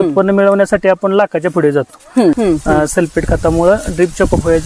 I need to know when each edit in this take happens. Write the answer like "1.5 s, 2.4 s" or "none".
2.4 s